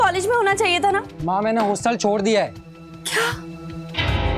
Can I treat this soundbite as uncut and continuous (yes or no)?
no